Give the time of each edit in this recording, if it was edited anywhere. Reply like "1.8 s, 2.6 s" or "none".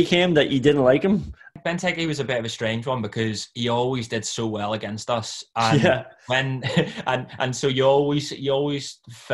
1.5 s